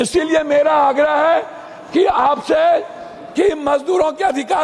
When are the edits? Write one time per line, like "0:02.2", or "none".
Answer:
none